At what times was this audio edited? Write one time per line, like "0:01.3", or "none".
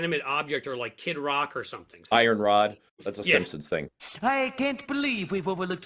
0:02.0
0:04.0